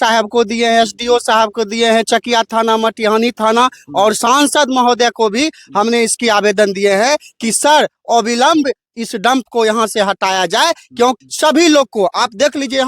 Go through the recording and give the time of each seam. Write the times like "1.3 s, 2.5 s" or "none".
11.2 s